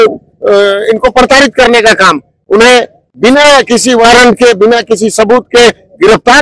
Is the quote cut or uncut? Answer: uncut